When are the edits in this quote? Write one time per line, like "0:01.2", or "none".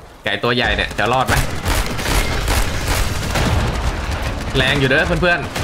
none